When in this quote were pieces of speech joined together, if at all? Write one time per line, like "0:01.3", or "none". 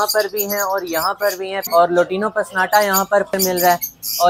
0:01.6
0:03.3